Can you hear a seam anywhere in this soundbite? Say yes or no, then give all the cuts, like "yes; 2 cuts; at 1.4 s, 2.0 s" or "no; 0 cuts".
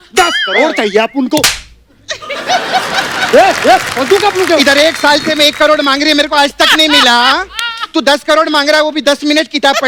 no; 0 cuts